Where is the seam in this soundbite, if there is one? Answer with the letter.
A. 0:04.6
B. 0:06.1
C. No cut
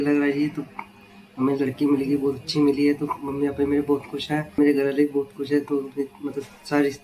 A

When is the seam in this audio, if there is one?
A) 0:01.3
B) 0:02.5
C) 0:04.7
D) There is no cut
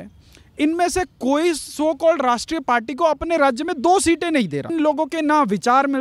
C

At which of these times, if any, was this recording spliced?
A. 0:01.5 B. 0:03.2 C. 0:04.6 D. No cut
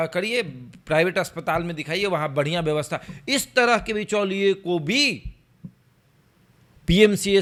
D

